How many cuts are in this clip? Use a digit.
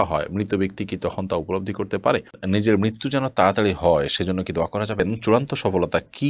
2